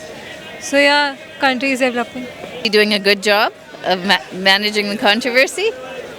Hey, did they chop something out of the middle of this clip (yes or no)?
yes